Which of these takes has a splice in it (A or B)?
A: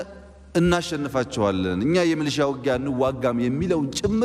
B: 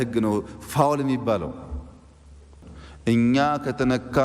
B